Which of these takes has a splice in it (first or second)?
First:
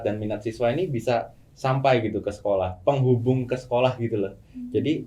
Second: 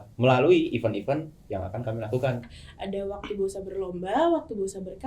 second